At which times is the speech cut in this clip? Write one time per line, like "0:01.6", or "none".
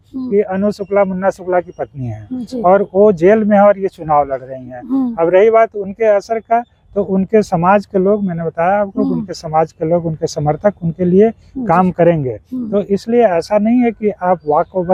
none